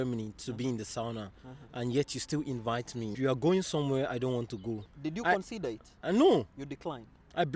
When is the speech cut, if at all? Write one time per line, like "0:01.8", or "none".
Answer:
0:03.1
0:04.9